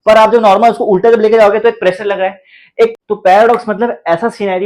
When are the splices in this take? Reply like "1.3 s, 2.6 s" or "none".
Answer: 2.9 s

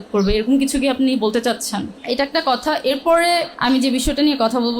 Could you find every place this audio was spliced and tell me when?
1.9 s, 3.5 s

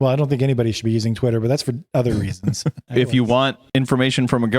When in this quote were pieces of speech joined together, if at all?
2.8 s

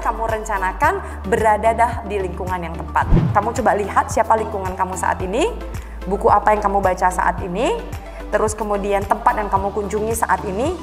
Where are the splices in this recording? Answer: 3.2 s

